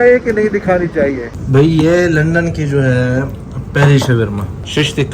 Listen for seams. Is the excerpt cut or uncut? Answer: cut